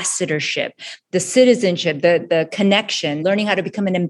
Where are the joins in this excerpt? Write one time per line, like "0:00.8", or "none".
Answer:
0:03.2